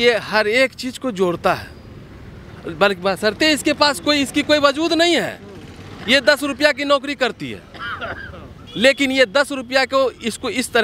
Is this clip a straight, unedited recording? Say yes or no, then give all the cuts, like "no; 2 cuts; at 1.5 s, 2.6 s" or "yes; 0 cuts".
yes; 0 cuts